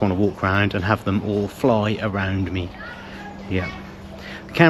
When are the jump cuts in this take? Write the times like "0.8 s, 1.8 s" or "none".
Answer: none